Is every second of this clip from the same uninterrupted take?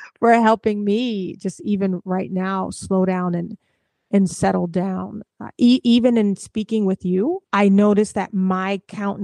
no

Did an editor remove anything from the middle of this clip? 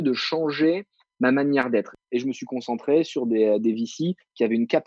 yes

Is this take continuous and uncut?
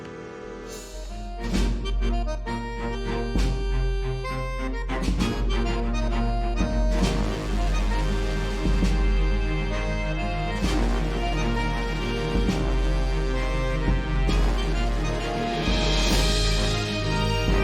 no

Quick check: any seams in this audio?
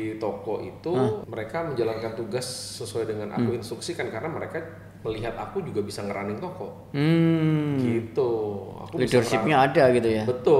yes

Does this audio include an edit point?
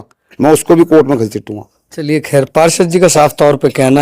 no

